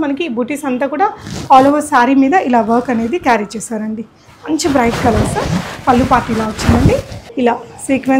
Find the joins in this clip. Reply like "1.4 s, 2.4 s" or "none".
7.2 s